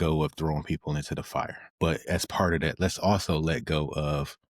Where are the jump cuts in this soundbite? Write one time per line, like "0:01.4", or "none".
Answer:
0:01.6